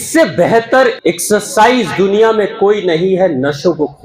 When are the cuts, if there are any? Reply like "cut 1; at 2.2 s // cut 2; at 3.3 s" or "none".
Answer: cut 1; at 0.9 s